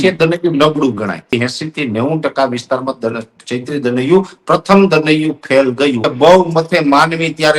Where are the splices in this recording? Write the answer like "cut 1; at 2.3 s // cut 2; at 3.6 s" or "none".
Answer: cut 1; at 1.3 s // cut 2; at 6.0 s